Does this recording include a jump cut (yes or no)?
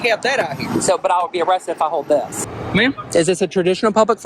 yes